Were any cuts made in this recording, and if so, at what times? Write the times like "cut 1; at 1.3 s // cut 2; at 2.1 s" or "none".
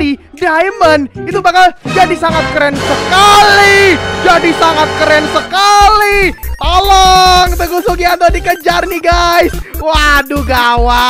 cut 1; at 6.5 s